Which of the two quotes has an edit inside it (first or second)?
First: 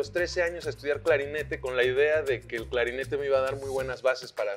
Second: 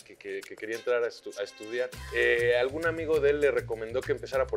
second